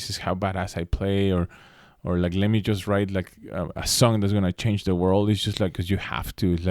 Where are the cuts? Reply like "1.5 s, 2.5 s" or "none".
5.8 s